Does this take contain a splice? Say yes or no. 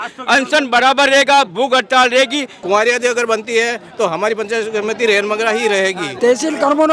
yes